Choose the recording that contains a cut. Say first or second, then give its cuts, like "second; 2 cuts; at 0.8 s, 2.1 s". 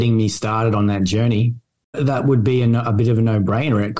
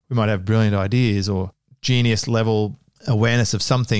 first; 1 cut; at 1.8 s